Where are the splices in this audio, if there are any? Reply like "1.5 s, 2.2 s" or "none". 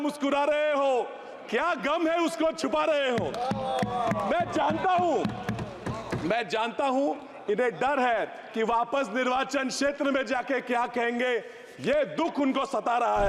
none